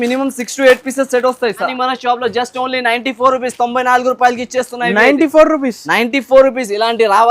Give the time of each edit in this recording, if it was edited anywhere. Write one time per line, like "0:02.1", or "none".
0:01.7